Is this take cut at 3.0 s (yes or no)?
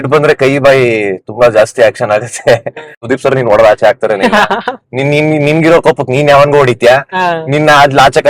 yes